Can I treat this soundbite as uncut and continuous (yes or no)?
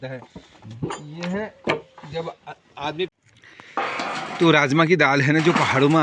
no